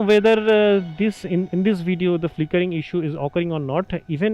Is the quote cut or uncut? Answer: uncut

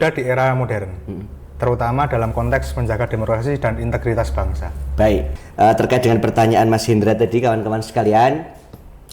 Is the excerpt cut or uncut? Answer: cut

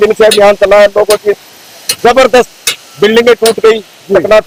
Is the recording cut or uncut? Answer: uncut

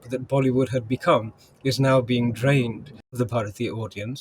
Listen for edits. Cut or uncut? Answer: cut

